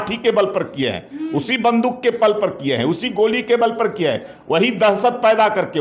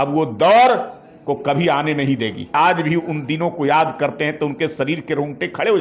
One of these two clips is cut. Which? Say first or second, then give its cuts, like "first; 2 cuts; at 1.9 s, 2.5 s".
second; 1 cut; at 2.5 s